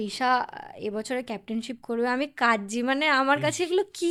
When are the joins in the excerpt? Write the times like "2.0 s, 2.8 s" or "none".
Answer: none